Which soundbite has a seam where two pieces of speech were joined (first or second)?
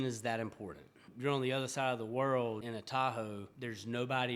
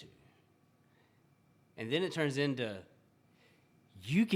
first